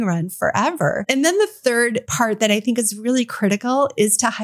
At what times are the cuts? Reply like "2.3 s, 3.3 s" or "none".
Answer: 1.0 s, 2.1 s